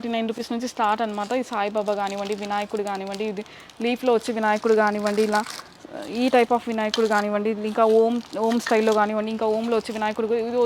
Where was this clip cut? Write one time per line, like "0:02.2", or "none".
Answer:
none